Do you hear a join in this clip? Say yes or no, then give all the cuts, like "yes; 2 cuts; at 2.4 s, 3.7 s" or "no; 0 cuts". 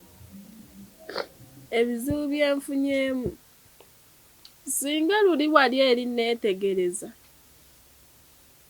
yes; 1 cut; at 1.6 s